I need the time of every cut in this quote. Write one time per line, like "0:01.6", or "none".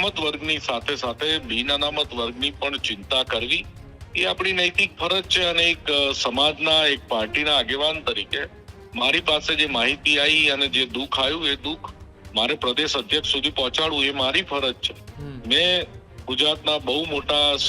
none